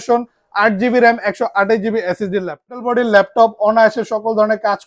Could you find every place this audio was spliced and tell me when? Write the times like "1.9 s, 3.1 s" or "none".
2.8 s